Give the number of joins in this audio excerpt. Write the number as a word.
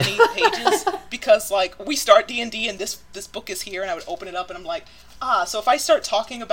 zero